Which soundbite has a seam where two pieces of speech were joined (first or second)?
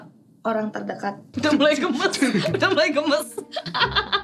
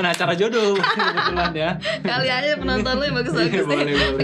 first